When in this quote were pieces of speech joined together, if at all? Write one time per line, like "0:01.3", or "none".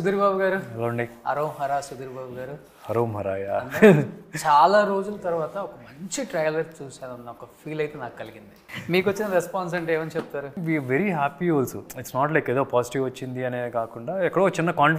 0:08.7
0:10.6